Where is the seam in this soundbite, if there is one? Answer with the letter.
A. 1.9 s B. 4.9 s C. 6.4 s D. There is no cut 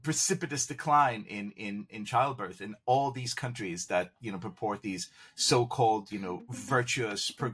D